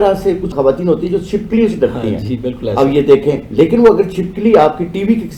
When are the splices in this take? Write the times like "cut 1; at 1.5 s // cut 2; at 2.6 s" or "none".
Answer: none